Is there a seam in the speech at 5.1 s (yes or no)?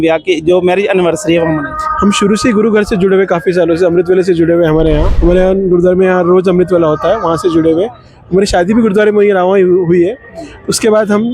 yes